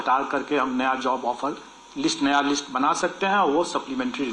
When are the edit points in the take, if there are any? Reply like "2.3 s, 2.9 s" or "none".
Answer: none